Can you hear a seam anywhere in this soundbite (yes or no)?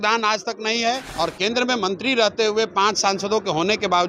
yes